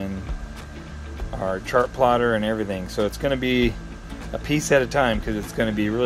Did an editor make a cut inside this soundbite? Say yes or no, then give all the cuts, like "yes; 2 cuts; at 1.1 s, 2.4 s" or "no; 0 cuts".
no; 0 cuts